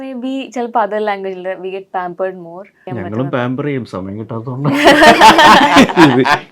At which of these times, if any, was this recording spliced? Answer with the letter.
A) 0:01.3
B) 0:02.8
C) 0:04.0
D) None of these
B